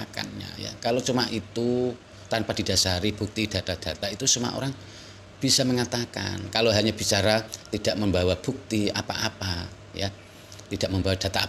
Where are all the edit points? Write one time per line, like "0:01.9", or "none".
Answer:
none